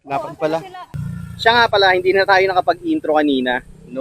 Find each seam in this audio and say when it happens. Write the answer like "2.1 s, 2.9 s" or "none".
0.9 s